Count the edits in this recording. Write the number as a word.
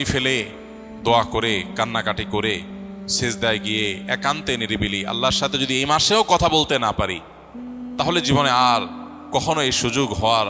zero